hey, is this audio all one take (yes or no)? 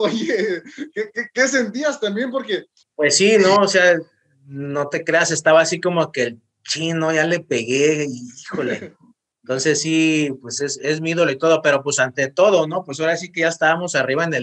no